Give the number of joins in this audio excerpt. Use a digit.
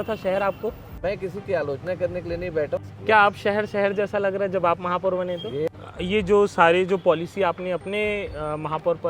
3